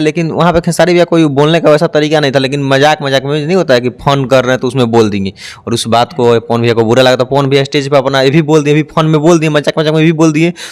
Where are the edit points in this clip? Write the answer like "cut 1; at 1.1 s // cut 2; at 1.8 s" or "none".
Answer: none

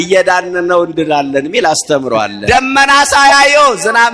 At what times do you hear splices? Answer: cut 1; at 2.4 s

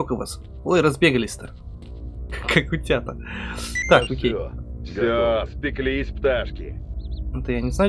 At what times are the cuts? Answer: none

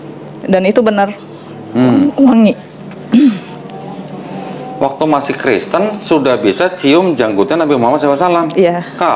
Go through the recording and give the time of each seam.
none

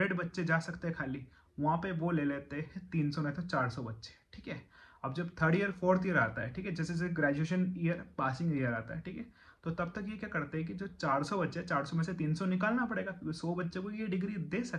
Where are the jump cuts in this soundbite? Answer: none

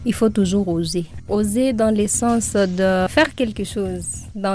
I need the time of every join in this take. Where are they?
cut 1; at 1.0 s // cut 2; at 3.1 s

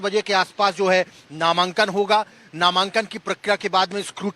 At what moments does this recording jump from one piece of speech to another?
cut 1; at 3.2 s

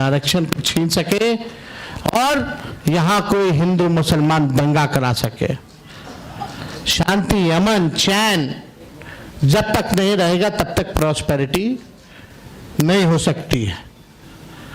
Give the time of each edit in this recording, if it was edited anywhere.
none

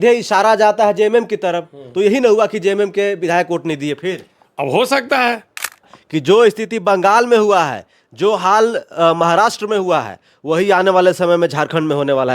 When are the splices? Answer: cut 1; at 5.9 s

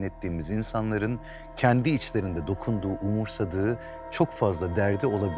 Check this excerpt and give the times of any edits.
none

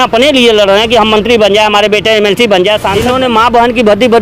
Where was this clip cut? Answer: cut 1; at 3.0 s

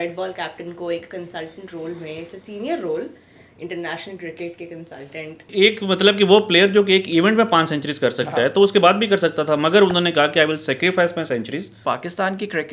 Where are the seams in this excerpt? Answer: cut 1; at 5.5 s // cut 2; at 11.8 s

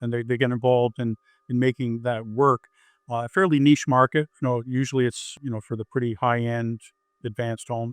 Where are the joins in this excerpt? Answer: cut 1; at 5.3 s

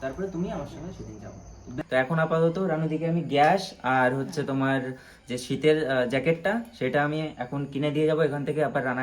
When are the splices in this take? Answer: cut 1; at 1.7 s

